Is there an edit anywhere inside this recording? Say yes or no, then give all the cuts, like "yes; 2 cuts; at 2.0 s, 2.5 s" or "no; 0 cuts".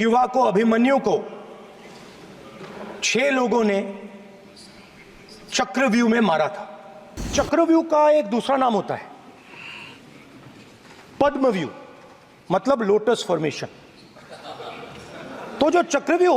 yes; 1 cut; at 7.3 s